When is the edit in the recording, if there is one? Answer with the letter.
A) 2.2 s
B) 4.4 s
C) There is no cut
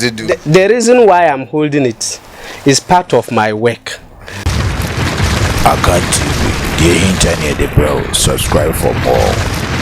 B